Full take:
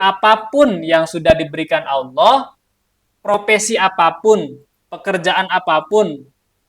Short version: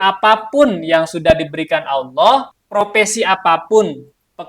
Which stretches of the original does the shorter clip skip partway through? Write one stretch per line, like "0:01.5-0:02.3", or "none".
0:02.6-0:03.1